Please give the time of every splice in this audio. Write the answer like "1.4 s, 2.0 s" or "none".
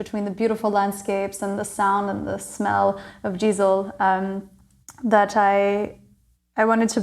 none